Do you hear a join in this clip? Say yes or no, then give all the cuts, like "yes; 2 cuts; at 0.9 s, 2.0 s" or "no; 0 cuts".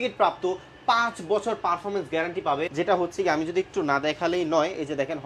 no; 0 cuts